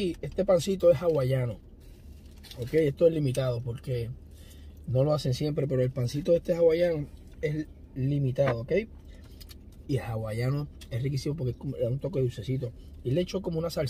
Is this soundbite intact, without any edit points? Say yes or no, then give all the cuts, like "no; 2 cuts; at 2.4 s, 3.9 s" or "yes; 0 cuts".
yes; 0 cuts